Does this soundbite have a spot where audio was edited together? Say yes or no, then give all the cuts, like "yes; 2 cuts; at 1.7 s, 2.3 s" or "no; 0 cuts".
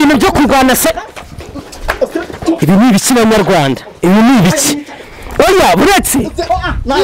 no; 0 cuts